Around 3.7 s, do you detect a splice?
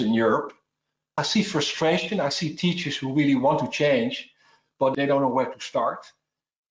no; 1 cut; at 4.9 s

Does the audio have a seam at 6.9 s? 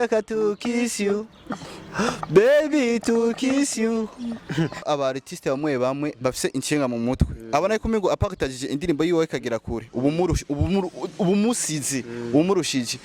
no; 1 cut; at 4.8 s

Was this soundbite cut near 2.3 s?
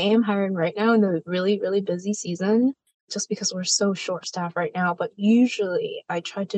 no; 0 cuts

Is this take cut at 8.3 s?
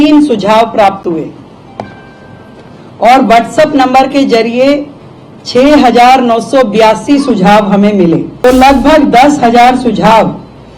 yes; 1 cut; at 8.3 s

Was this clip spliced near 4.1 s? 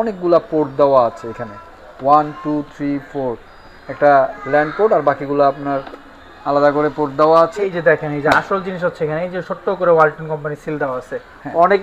no; 1 cut; at 7.8 s

